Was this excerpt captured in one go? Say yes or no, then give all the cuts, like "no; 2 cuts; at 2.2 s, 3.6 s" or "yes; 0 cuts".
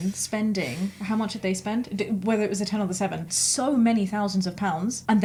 yes; 0 cuts